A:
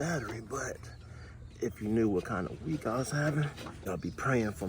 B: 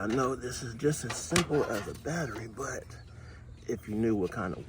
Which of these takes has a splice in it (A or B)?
A